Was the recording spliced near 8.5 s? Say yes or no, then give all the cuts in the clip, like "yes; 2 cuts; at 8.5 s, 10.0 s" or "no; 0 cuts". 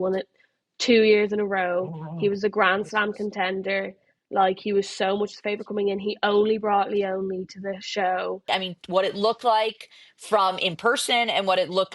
yes; 1 cut; at 8.5 s